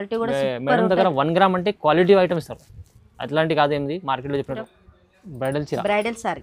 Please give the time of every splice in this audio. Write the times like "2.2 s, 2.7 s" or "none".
4.6 s